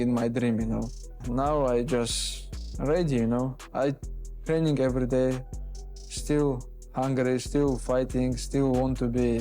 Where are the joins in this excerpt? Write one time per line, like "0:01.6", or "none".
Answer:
0:01.1